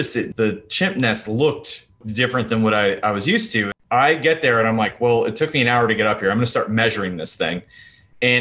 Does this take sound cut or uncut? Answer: cut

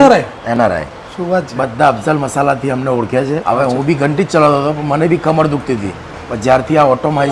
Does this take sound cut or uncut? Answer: cut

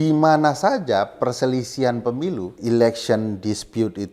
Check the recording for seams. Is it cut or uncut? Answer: cut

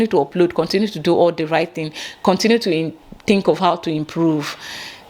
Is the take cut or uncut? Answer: uncut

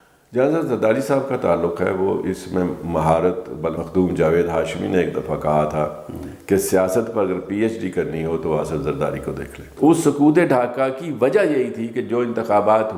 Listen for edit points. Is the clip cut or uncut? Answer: cut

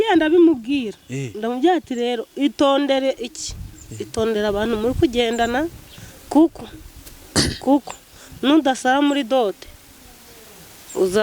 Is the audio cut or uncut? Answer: uncut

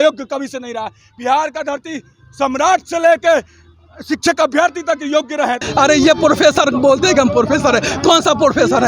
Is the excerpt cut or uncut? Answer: cut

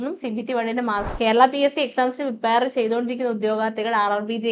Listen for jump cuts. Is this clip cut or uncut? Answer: cut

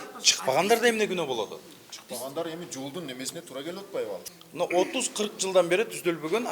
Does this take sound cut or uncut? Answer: cut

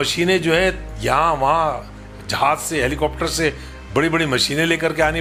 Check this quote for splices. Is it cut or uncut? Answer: uncut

